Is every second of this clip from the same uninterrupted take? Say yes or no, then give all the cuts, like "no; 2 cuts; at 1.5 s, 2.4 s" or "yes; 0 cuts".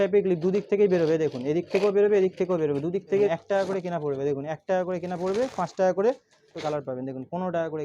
no; 2 cuts; at 3.3 s, 6.5 s